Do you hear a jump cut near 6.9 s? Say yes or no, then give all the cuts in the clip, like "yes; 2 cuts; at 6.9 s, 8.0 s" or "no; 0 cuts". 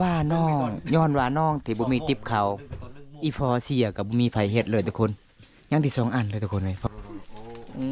yes; 1 cut; at 6.9 s